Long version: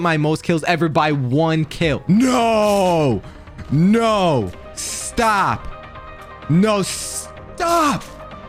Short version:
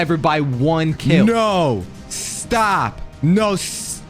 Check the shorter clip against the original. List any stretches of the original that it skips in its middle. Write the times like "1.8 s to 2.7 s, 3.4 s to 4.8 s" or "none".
1.7 s to 3.7 s, 5.7 s to 6.3 s